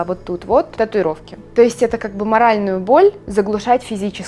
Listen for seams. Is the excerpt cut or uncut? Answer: uncut